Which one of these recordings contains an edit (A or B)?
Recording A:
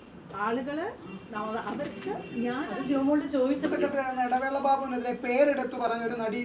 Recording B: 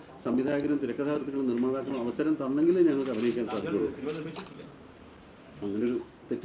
A